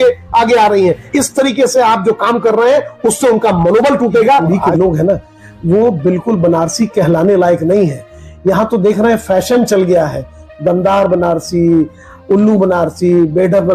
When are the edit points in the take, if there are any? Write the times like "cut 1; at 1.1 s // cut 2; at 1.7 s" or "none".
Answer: cut 1; at 1.1 s // cut 2; at 4.5 s